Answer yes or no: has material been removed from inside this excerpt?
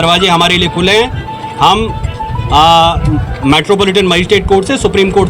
no